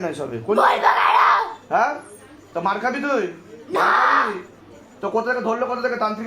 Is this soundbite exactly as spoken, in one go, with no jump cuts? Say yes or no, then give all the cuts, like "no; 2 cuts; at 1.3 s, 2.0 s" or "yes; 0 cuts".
yes; 0 cuts